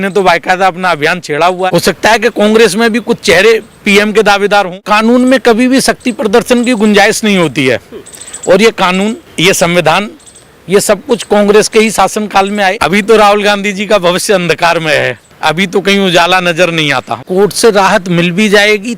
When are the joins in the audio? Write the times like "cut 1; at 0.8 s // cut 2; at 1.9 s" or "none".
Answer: cut 1; at 1.7 s // cut 2; at 4.8 s // cut 3; at 9.3 s // cut 4; at 12.8 s // cut 5; at 15.2 s // cut 6; at 17.2 s